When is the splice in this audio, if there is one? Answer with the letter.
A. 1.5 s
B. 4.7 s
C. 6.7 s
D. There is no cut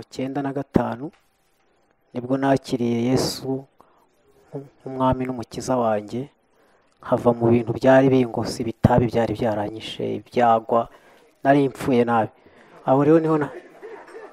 D